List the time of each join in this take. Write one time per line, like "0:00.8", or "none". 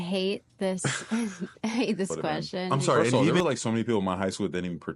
0:03.2